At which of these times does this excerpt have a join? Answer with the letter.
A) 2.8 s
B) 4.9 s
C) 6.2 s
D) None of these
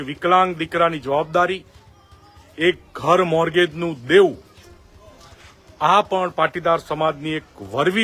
D